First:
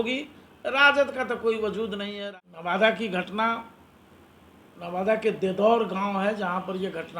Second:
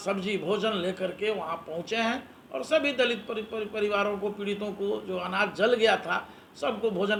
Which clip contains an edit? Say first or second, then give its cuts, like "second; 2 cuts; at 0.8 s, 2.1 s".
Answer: first; 1 cut; at 2.2 s